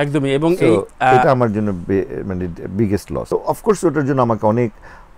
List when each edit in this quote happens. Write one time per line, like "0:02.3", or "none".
0:03.3